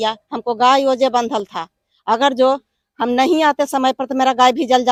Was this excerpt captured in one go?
yes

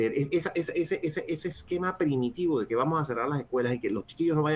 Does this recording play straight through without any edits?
yes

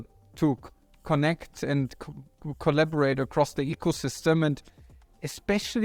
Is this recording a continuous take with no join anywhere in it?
yes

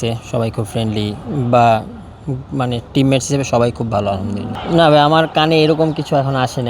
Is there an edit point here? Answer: yes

